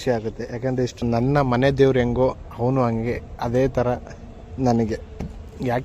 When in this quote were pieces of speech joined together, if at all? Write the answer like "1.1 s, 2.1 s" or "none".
1.0 s